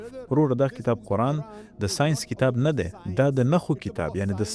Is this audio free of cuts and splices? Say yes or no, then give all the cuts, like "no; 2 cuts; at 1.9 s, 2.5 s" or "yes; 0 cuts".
yes; 0 cuts